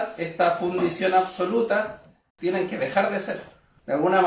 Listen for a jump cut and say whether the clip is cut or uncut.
cut